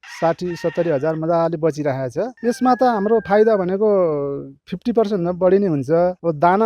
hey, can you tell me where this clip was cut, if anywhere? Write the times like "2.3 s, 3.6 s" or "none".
2.3 s